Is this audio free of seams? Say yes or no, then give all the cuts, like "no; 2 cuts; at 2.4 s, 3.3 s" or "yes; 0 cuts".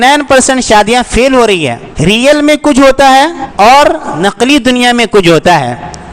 no; 3 cuts; at 1.8 s, 3.4 s, 4.1 s